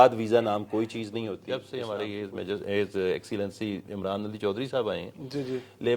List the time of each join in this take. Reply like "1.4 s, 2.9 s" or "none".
1.4 s